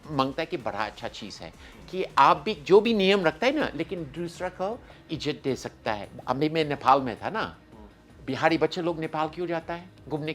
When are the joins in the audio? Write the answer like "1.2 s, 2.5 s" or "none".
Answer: 6.2 s